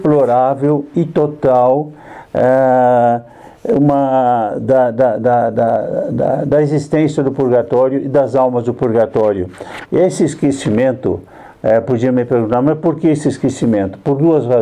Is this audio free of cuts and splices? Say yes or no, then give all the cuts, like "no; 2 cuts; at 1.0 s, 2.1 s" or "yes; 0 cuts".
yes; 0 cuts